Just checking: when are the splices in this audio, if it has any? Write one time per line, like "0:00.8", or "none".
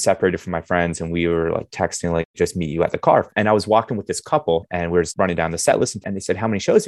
0:02.3
0:03.3
0:05.1
0:06.1

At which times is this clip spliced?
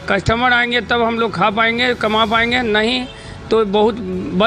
none

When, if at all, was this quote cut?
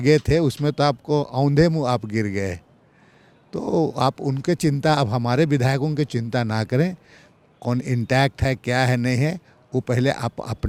none

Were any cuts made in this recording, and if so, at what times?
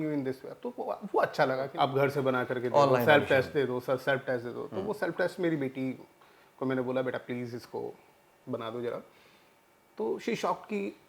0:01.7

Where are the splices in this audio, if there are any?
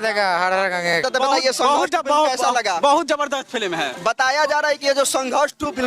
0:01.0

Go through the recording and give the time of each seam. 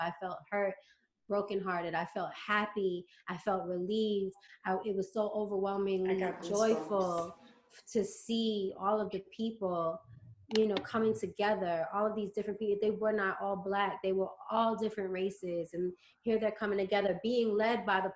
none

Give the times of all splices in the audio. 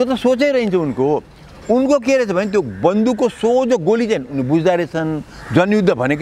none

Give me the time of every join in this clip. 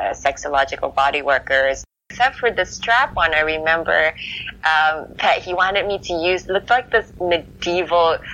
0:02.1

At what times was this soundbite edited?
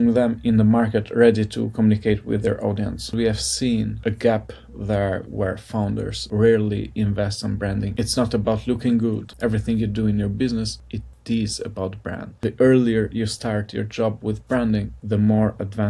0:03.1
0:07.9
0:09.3
0:12.3

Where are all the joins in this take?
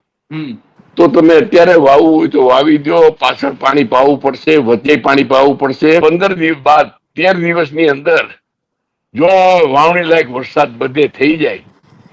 0:06.0

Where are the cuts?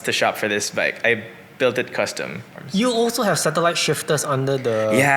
0:02.5

